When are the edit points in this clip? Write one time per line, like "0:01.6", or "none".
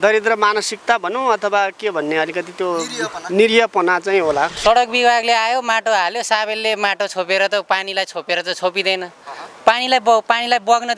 0:04.5